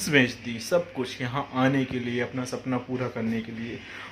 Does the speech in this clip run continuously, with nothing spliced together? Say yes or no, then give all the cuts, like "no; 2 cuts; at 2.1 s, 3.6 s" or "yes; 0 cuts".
yes; 0 cuts